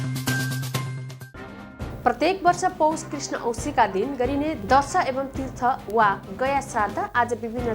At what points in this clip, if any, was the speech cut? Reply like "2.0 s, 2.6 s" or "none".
1.0 s